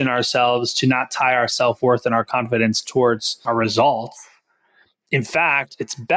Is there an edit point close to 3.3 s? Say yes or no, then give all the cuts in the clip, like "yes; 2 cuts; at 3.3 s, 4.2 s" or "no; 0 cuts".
yes; 1 cut; at 3.3 s